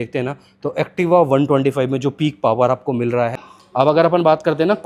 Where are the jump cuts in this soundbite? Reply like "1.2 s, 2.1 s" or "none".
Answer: 3.4 s

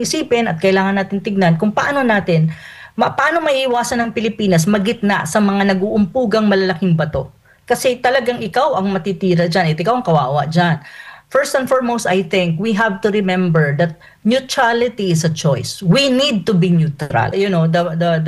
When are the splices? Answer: 17.3 s

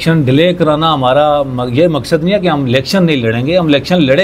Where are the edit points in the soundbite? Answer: none

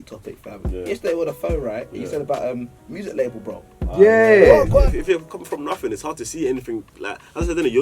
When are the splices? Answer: 4.9 s

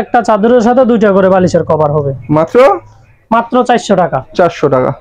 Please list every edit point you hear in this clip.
none

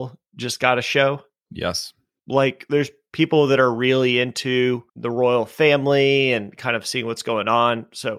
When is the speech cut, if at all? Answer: 2.1 s, 4.9 s

